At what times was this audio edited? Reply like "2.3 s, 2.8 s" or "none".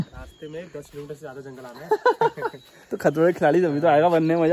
none